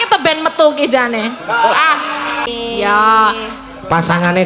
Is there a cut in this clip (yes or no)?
yes